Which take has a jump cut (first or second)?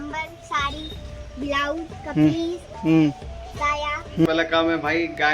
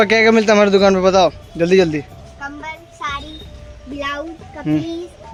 first